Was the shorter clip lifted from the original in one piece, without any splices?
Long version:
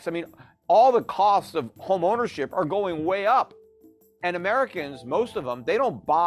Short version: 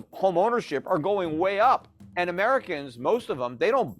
no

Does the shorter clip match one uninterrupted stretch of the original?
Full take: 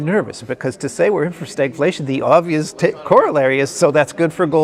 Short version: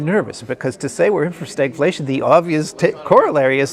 yes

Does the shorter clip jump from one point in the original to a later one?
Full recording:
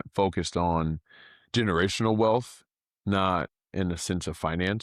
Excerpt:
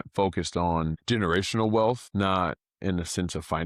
yes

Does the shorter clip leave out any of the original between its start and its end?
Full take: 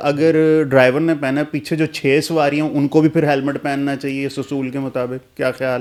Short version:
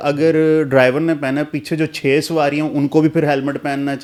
no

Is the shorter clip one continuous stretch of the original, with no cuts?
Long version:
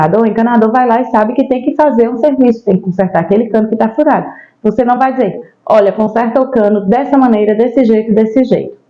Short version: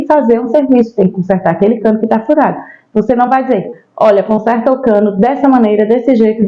yes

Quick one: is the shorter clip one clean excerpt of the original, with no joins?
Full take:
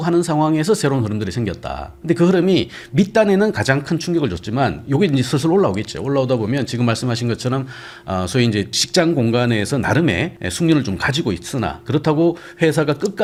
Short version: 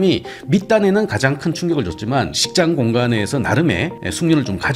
no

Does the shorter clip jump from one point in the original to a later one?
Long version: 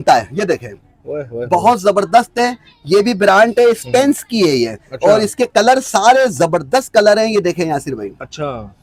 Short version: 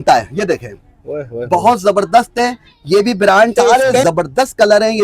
yes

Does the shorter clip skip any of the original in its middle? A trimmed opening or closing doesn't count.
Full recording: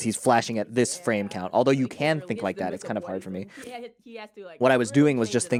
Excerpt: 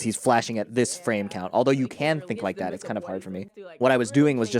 yes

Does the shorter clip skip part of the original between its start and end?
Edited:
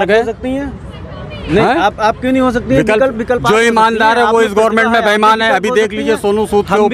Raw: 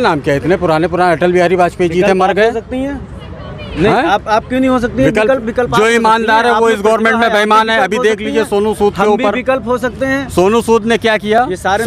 no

